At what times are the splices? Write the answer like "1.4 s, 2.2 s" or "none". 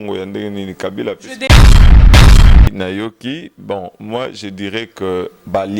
1.4 s, 2.7 s